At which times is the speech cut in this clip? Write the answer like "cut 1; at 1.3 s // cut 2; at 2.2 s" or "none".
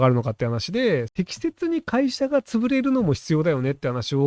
cut 1; at 1.1 s